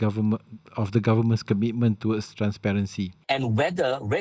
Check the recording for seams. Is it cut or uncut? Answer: cut